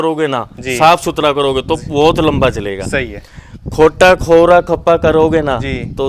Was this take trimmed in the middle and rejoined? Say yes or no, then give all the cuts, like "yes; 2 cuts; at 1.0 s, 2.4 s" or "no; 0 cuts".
no; 0 cuts